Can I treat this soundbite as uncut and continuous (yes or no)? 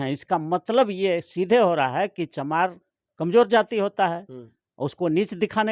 yes